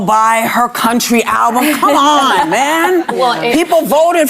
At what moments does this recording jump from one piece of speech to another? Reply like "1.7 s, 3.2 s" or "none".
2.0 s